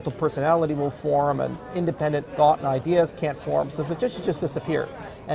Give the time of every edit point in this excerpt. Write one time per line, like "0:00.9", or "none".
none